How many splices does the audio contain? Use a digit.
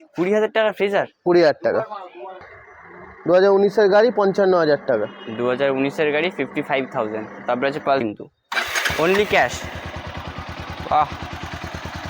2